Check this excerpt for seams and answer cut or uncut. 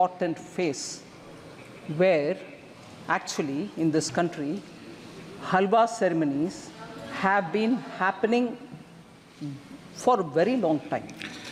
uncut